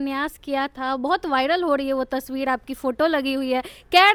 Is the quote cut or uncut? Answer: uncut